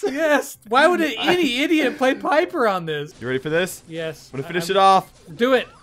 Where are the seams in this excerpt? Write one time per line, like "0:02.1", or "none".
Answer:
0:03.1